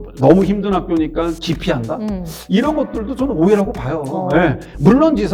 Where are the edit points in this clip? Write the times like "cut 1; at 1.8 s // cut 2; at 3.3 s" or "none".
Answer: none